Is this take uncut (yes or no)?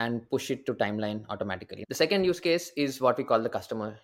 no